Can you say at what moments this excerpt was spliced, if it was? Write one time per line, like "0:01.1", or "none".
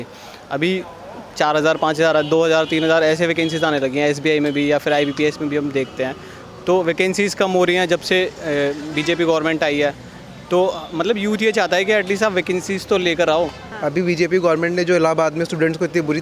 0:13.6